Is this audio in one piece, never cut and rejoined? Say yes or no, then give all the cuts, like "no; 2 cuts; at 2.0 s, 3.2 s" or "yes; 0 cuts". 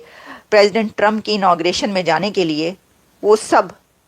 yes; 0 cuts